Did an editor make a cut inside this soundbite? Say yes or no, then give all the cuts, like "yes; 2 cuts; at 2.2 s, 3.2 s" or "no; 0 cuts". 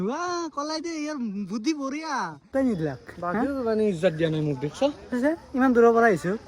yes; 1 cut; at 2.4 s